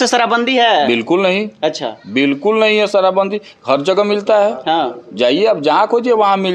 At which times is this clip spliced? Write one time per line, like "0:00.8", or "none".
none